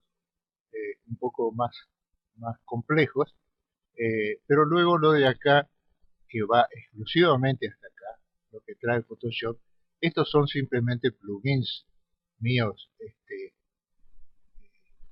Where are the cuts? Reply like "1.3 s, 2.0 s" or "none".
7.4 s